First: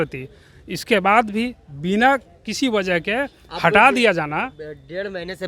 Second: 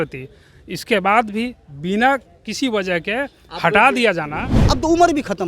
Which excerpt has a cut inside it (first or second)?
second